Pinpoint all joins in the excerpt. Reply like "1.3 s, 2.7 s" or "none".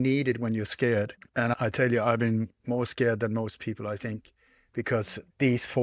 1.2 s